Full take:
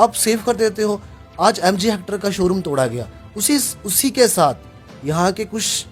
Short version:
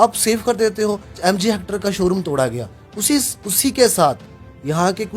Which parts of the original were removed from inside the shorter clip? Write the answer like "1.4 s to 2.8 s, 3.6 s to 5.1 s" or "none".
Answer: 1.2 s to 1.6 s